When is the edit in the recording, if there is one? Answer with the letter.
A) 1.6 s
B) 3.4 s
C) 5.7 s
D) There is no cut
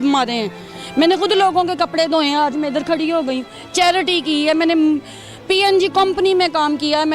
D